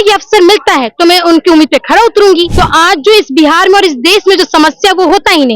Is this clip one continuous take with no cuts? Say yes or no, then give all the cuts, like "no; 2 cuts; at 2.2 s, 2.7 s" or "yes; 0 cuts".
no; 1 cut; at 2.5 s